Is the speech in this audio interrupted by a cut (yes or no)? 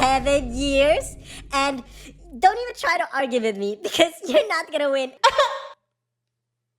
no